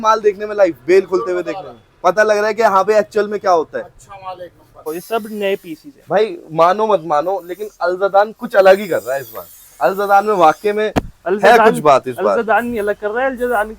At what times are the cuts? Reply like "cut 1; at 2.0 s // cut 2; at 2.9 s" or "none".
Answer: cut 1; at 4.8 s